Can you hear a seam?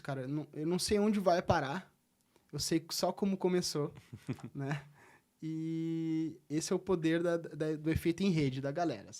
no; 0 cuts

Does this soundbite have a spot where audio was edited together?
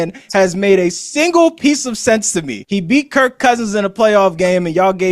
yes; 1 cut; at 2.6 s

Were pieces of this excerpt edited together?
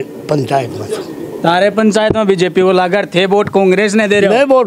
no; 0 cuts

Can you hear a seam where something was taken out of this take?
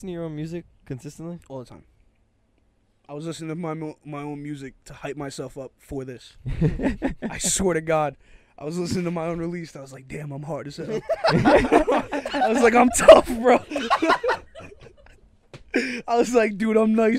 no; 0 cuts

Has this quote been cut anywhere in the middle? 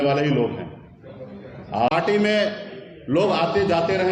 yes; 1 cut; at 1.9 s

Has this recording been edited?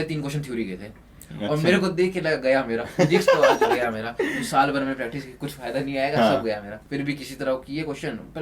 yes; 1 cut; at 6.7 s

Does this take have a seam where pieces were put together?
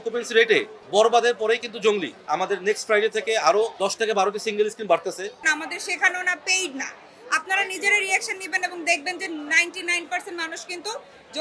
yes; 2 cuts; at 2.1 s, 5.5 s

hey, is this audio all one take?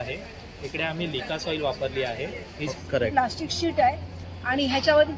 no; 1 cut; at 2.7 s

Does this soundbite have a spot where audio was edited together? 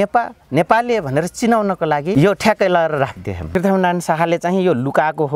yes; 2 cuts; at 2.1 s, 3.4 s

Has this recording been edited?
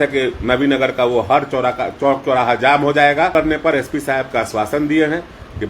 yes; 1 cut; at 3.3 s

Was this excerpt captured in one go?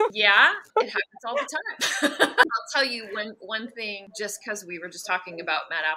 no; 2 cuts; at 2.5 s, 4.1 s

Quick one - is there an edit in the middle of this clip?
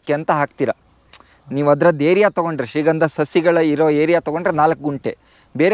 no; 0 cuts

